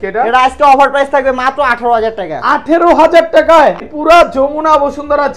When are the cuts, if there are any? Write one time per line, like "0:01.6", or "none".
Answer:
0:03.8